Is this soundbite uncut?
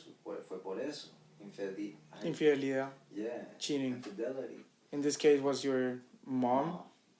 yes; 0 cuts

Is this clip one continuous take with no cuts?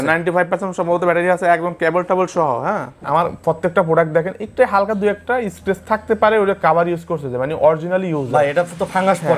no; 1 cut; at 2.9 s

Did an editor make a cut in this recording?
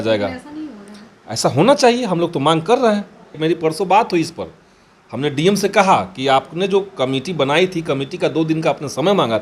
yes; 1 cut; at 3.3 s

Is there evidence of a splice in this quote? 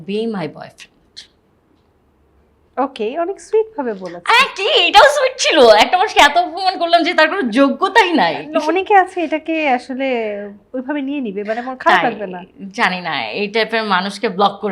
no; 0 cuts

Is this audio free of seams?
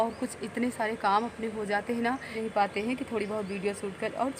no; 1 cut; at 2.3 s

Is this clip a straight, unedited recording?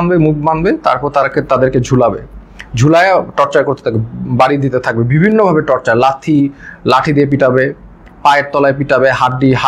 yes; 0 cuts

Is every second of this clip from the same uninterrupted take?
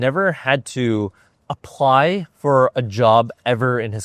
yes; 0 cuts

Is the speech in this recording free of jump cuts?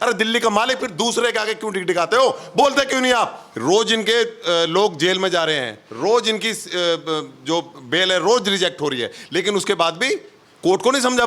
no; 1 cut; at 3.5 s

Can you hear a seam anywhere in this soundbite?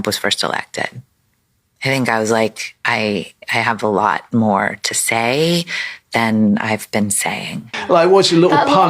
yes; 1 cut; at 7.7 s

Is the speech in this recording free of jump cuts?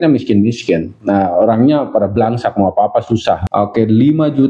no; 1 cut; at 3.4 s

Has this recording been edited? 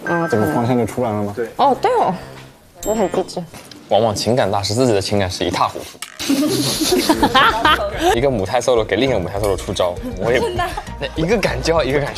yes; 2 cuts; at 3.5 s, 8.1 s

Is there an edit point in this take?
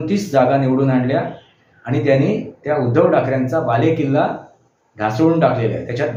no; 0 cuts

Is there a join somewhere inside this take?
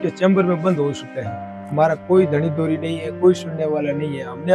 no; 0 cuts

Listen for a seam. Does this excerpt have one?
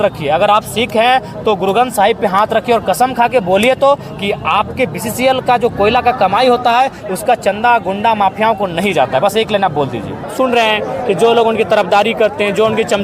yes; 1 cut; at 10.3 s

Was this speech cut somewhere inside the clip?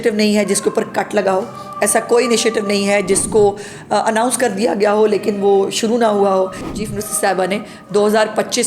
yes; 1 cut; at 6.8 s

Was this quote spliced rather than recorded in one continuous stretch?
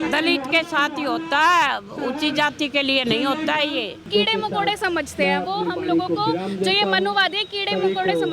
yes; 1 cut; at 4.1 s

